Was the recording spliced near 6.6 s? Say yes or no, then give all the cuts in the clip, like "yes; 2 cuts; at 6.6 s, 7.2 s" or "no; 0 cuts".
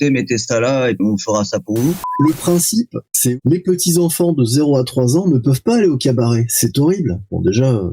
no; 3 cuts; at 1.0 s, 2.1 s, 3.3 s